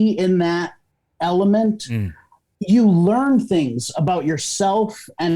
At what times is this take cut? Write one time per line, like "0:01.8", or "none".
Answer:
none